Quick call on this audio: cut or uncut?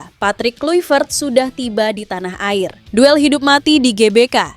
cut